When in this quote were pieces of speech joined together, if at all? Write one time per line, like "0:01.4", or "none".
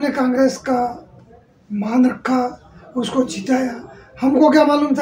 none